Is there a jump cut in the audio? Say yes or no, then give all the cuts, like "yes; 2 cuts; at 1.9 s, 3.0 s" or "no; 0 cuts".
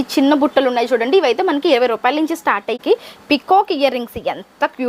yes; 1 cut; at 2.8 s